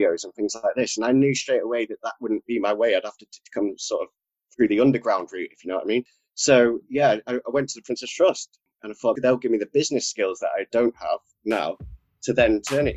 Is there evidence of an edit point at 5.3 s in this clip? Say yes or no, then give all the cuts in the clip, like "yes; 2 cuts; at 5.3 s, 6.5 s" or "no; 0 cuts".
no; 0 cuts